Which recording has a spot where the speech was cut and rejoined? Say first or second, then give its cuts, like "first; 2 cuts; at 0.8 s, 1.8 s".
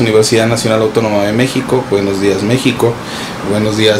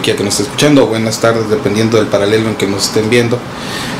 first; 1 cut; at 1.1 s